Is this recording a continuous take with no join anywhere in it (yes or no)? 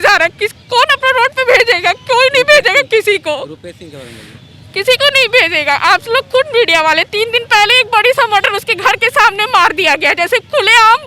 yes